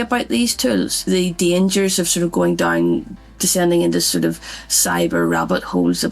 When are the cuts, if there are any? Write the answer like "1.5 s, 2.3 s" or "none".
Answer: 1.0 s

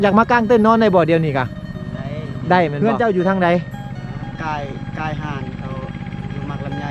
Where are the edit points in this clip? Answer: 2.8 s

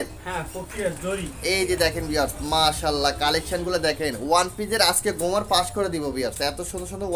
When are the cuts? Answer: none

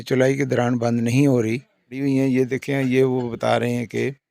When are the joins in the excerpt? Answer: 2.0 s

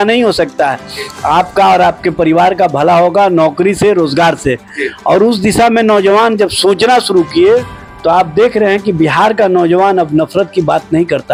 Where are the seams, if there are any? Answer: none

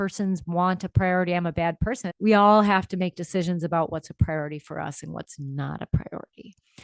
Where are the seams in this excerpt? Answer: 2.1 s

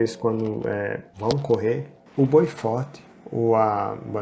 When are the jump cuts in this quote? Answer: 1.1 s, 2.0 s

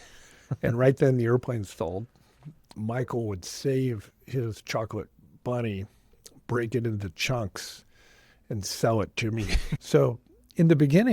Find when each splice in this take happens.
2.7 s, 9.7 s

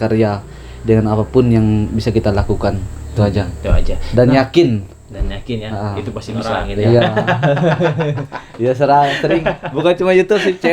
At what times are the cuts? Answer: 6.7 s

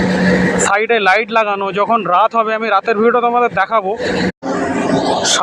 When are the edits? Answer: 4.3 s

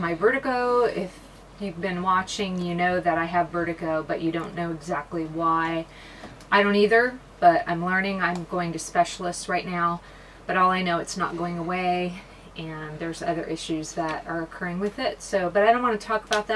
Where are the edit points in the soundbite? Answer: none

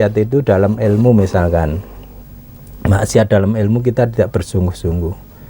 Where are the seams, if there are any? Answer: none

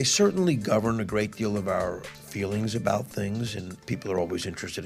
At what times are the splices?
2.1 s, 3.7 s

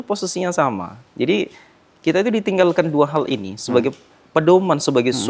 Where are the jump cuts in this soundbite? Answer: 0.9 s

